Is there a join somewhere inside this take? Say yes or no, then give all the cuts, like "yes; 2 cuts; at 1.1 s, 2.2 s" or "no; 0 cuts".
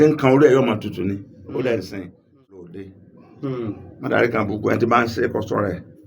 yes; 1 cut; at 2.5 s